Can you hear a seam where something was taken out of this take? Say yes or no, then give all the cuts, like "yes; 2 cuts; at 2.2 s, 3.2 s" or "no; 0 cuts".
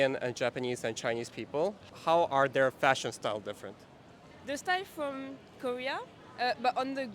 yes; 1 cut; at 6.2 s